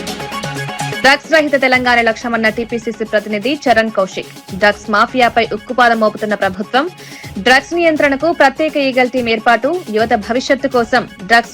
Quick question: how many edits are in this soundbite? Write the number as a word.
one